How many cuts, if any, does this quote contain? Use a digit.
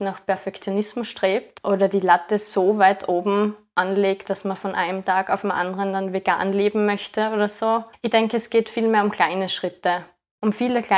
2